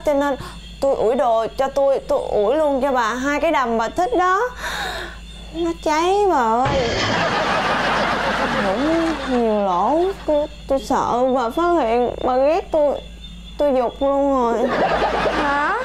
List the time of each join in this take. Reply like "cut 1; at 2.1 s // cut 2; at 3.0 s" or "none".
none

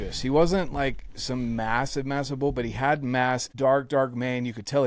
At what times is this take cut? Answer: cut 1; at 3.5 s

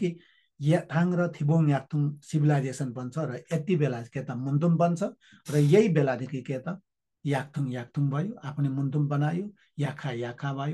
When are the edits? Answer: none

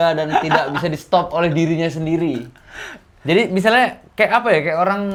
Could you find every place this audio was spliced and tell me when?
none

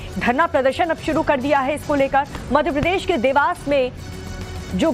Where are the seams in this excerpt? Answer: cut 1; at 2.9 s

